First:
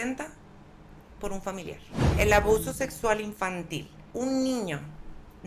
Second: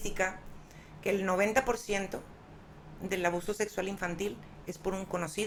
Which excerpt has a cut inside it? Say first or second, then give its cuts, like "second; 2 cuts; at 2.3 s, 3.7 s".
first; 2 cuts; at 2.1 s, 4.0 s